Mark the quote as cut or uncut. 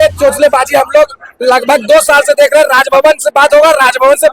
uncut